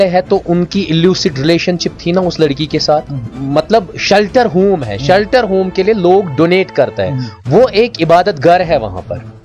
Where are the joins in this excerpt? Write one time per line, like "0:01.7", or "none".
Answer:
0:03.2